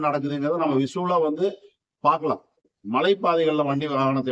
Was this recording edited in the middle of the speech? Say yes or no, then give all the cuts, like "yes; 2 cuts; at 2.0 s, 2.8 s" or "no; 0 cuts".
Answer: yes; 1 cut; at 2.6 s